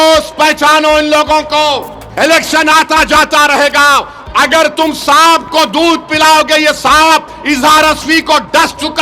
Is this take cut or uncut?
cut